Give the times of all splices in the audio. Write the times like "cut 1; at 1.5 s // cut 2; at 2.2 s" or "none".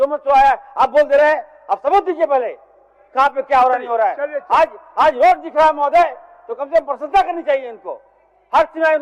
none